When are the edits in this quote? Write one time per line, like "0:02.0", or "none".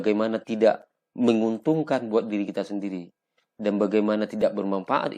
none